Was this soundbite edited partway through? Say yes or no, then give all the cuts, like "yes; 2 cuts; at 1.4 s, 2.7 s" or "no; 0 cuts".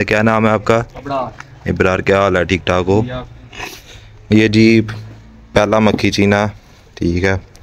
no; 0 cuts